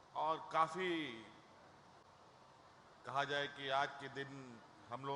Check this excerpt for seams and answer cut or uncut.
cut